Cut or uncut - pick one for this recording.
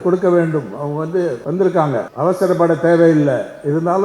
cut